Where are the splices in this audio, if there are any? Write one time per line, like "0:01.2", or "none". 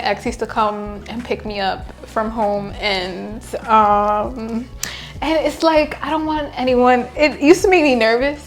none